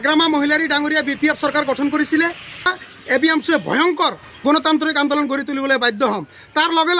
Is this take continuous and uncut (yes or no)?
no